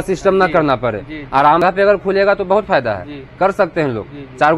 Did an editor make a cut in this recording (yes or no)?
yes